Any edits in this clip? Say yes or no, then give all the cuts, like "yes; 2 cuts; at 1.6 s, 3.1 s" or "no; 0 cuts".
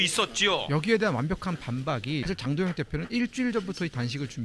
yes; 1 cut; at 2.2 s